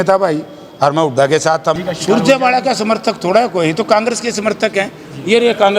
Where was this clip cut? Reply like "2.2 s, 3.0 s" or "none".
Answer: 1.8 s